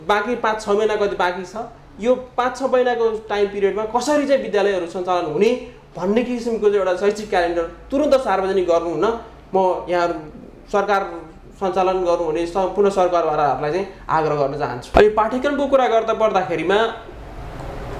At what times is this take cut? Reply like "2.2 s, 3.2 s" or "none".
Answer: 14.8 s